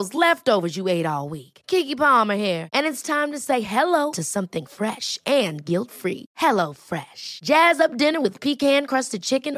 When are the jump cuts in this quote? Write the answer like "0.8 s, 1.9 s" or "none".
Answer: none